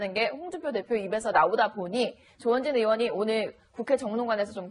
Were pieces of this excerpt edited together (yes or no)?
yes